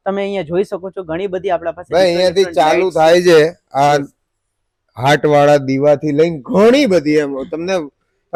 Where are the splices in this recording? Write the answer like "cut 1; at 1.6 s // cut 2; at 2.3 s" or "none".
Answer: none